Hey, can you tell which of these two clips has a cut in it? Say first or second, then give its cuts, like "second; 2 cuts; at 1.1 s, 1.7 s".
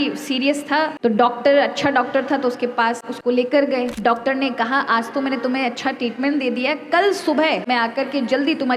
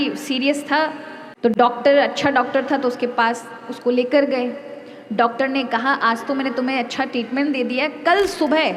first; 4 cuts; at 0.9 s, 3.1 s, 3.9 s, 7.6 s